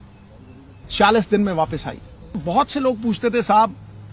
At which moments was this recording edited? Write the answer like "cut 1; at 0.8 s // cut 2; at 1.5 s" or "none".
cut 1; at 2.4 s